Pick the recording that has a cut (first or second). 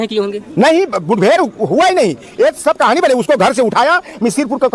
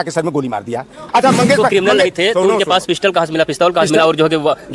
second